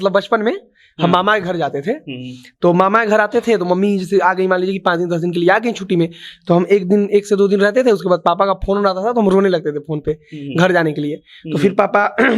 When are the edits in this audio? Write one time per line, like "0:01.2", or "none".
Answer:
none